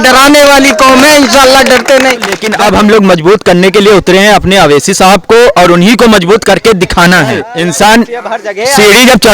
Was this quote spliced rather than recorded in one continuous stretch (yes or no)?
yes